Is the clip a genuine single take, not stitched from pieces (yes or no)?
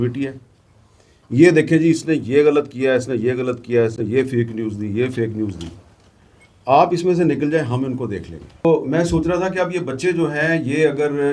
no